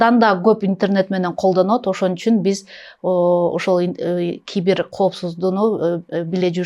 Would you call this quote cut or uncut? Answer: uncut